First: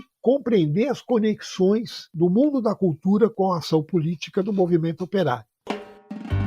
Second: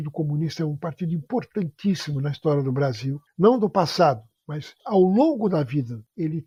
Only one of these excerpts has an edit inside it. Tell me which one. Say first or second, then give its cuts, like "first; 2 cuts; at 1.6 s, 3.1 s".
first; 1 cut; at 5.4 s